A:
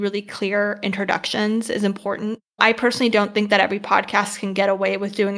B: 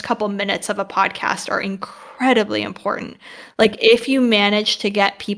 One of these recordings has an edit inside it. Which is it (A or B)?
A